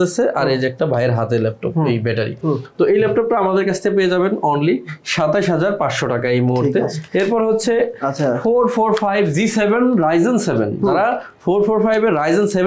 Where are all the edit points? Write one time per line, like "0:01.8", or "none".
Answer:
none